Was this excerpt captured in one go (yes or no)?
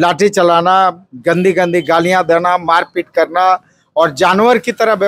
yes